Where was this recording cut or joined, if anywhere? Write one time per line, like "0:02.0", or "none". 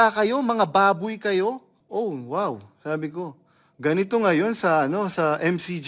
0:01.7